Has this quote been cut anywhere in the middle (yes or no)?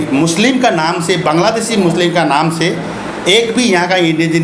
no